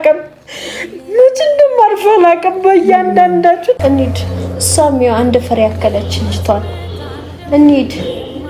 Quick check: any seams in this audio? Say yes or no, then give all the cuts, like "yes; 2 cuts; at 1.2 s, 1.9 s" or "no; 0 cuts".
yes; 1 cut; at 3.8 s